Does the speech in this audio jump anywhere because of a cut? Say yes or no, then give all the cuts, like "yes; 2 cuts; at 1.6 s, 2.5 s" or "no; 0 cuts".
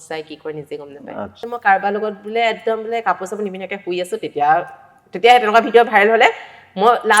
yes; 1 cut; at 1.5 s